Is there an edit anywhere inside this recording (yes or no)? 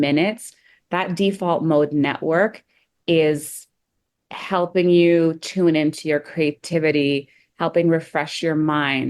no